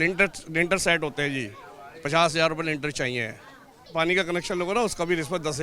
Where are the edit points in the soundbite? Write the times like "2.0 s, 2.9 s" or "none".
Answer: 3.9 s